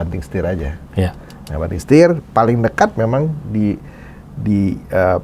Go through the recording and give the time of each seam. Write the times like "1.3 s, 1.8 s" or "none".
none